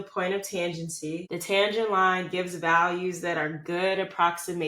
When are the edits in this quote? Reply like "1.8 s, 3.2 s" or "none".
1.3 s